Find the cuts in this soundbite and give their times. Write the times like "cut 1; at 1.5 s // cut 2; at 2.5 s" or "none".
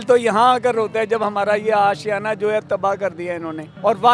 none